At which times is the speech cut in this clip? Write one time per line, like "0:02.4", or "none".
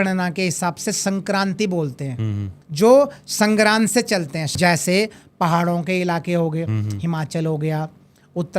0:02.6
0:04.5